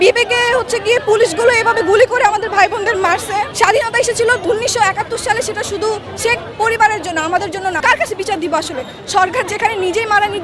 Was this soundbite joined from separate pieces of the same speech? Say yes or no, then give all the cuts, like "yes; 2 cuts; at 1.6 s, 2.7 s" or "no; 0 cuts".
yes; 3 cuts; at 3.5 s, 4.4 s, 7.8 s